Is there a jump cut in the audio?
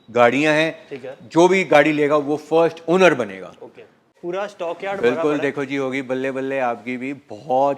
yes; 1 cut; at 4.1 s

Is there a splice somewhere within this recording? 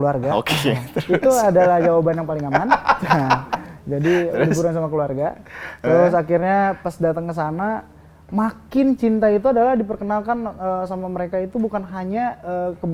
no; 0 cuts

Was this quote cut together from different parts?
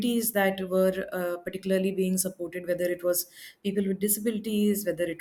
no; 0 cuts

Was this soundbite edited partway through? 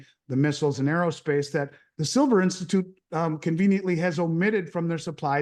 no; 0 cuts

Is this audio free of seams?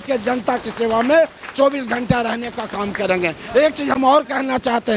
yes; 0 cuts

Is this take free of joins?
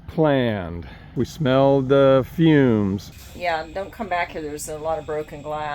no; 2 cuts; at 1.2 s, 3.1 s

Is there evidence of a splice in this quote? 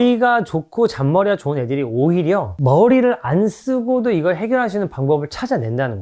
no; 0 cuts

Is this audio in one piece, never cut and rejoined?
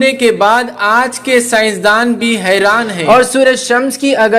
no; 1 cut; at 2.9 s

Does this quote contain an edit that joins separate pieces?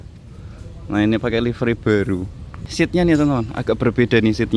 yes; 1 cut; at 2.7 s

